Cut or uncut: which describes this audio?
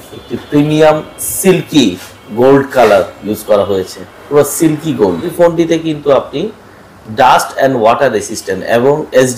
cut